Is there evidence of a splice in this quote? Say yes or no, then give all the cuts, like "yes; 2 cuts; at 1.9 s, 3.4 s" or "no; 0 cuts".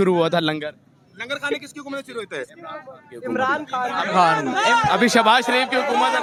no; 0 cuts